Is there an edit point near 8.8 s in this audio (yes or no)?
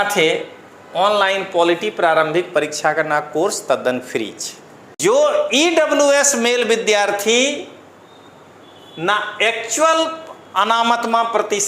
no